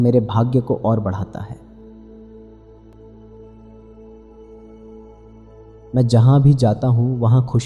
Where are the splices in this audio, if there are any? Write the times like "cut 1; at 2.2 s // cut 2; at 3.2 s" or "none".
cut 1; at 1.5 s // cut 2; at 4.1 s // cut 3; at 5.9 s